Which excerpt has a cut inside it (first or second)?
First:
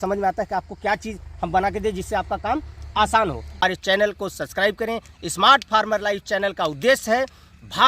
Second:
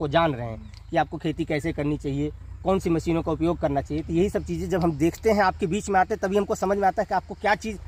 first